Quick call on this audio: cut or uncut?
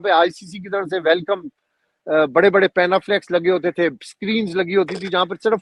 uncut